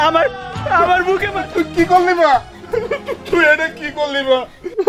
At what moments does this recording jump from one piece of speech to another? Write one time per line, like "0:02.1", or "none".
0:01.3